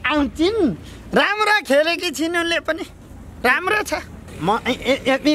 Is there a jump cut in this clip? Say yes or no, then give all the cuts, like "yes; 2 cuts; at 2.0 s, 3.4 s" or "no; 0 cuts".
yes; 1 cut; at 4.1 s